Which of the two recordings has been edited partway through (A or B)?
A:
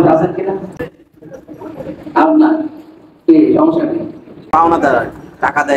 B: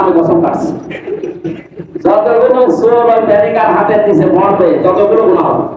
A